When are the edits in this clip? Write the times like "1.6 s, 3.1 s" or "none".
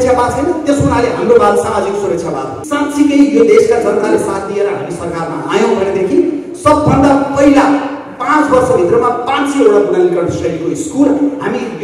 2.6 s